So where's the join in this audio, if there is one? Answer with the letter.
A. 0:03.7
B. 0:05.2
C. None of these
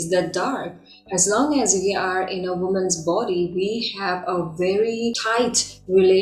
B